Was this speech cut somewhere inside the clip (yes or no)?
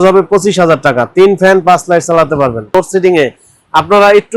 yes